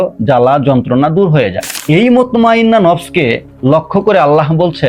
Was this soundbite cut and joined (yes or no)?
yes